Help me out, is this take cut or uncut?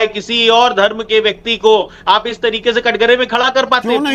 uncut